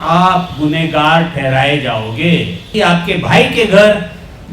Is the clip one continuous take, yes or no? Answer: no